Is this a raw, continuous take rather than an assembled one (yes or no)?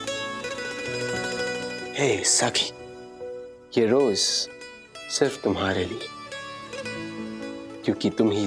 yes